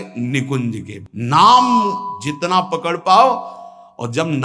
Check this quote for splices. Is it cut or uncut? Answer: cut